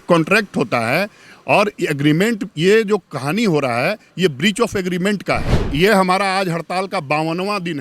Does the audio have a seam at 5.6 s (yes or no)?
yes